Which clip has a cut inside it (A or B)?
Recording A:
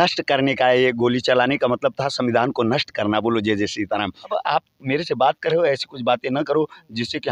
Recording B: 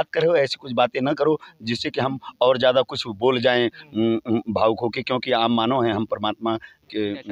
A